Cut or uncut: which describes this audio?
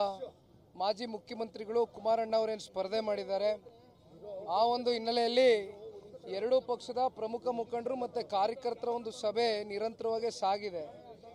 cut